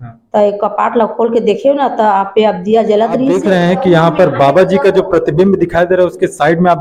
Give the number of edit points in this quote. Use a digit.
1